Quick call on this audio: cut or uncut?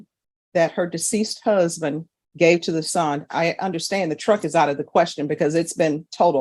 uncut